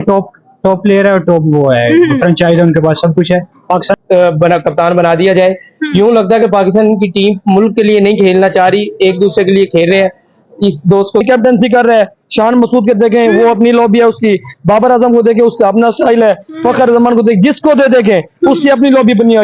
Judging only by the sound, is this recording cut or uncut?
cut